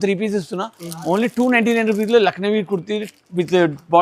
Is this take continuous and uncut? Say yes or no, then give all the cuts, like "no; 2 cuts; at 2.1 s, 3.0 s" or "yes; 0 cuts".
yes; 0 cuts